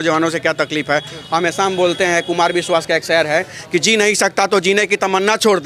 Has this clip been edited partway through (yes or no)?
no